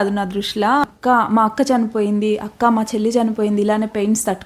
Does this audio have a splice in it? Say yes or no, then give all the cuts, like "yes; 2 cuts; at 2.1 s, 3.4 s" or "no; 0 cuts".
yes; 1 cut; at 0.9 s